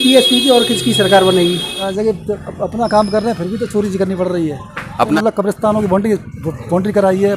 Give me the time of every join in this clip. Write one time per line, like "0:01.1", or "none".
0:01.9
0:05.1